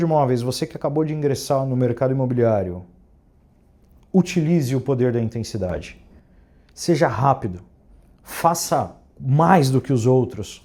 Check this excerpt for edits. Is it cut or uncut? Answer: uncut